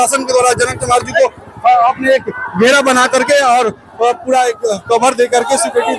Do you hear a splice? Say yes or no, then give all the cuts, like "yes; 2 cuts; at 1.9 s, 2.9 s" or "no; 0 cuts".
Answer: no; 0 cuts